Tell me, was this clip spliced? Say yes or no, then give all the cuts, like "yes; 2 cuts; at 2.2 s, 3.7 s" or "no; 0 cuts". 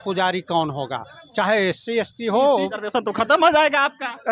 yes; 1 cut; at 2.8 s